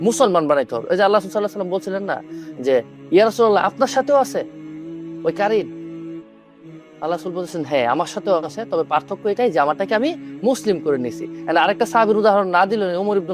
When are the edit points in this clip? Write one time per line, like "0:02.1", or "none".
none